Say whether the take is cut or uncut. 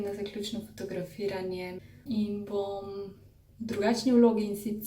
cut